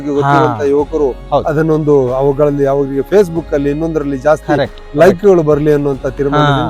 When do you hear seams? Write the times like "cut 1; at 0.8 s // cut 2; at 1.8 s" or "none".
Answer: none